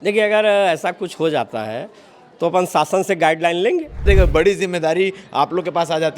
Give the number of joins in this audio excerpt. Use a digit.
1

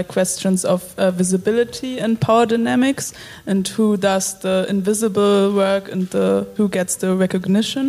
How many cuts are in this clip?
1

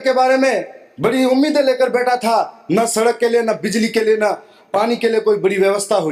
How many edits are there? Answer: 0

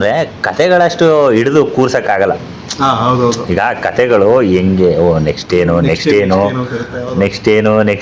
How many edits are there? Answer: 0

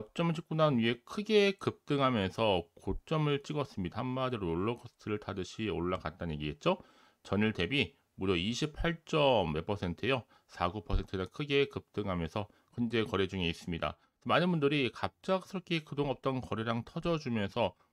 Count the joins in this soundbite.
1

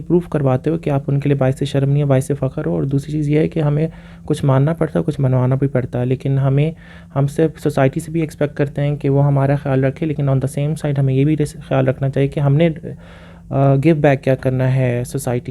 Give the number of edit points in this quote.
0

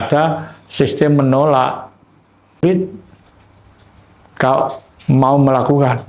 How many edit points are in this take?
1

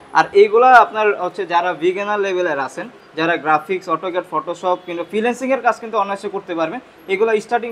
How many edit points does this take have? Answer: 0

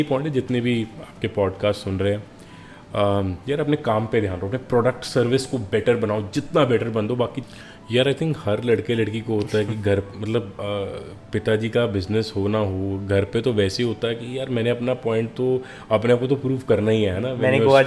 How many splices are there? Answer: 1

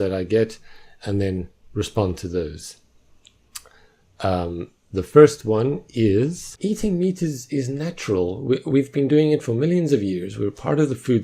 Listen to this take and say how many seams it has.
1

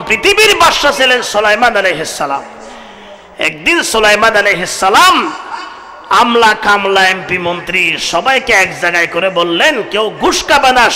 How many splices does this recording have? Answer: 0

